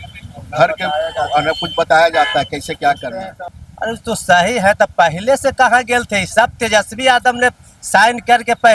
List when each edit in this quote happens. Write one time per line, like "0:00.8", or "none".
0:03.3